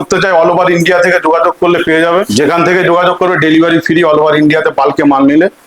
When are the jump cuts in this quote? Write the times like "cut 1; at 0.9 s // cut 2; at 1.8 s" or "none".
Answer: cut 1; at 2.3 s